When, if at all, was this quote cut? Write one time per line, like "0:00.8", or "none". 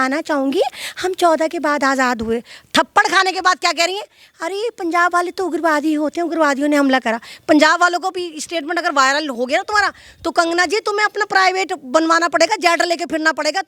none